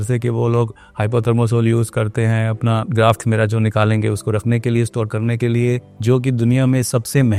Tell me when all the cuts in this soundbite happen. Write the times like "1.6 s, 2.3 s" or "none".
none